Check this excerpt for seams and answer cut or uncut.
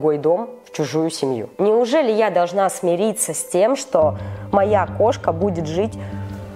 uncut